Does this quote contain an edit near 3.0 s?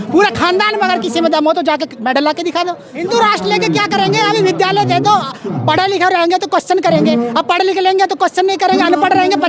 yes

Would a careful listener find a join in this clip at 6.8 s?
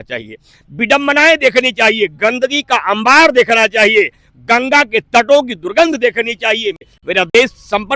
yes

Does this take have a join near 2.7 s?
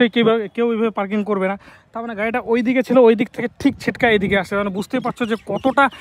no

